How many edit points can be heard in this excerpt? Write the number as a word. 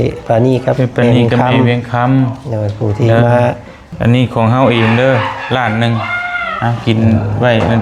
one